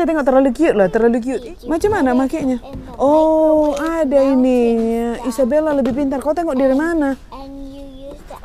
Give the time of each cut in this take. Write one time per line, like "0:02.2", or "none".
0:01.3